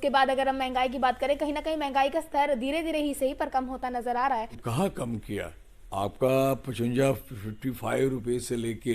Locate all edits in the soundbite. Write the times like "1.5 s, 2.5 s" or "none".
4.6 s